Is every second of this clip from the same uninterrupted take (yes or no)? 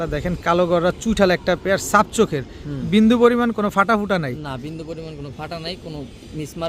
yes